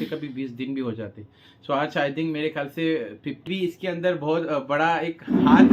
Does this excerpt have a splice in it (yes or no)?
yes